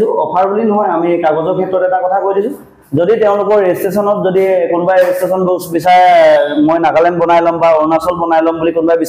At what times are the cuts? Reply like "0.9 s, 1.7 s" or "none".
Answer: none